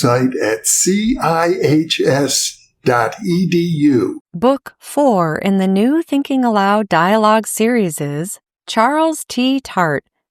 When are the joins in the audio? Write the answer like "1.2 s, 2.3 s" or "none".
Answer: 4.2 s